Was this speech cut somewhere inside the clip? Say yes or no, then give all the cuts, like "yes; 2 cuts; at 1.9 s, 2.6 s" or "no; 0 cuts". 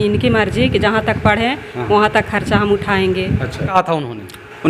yes; 1 cut; at 3.7 s